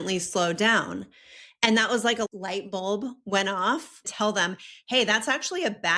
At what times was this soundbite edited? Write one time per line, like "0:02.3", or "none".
0:02.3
0:04.1